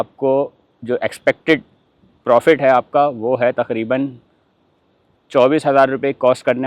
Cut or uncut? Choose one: uncut